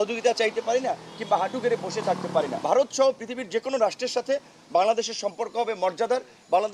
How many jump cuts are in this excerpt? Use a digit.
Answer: 1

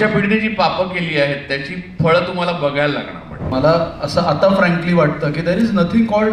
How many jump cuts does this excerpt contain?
1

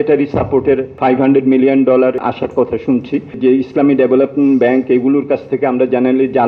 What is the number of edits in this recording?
3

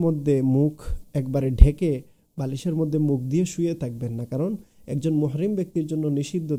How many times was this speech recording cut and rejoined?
0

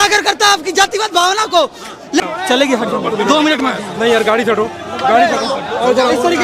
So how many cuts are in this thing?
1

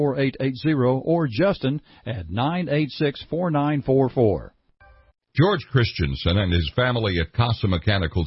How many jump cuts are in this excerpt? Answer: 1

